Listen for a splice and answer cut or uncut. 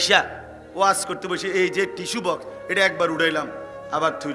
uncut